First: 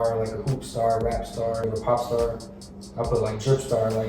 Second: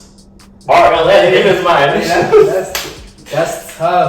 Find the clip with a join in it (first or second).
first